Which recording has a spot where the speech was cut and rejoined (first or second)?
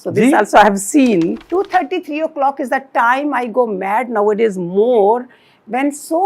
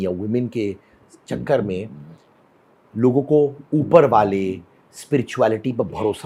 first